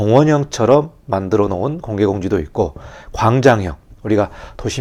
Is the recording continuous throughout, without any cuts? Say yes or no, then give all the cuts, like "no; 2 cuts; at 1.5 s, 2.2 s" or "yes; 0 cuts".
yes; 0 cuts